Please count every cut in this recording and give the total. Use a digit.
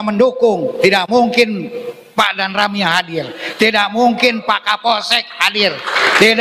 0